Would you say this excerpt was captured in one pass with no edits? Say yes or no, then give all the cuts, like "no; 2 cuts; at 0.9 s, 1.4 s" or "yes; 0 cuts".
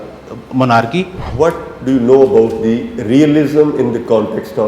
no; 1 cut; at 1.2 s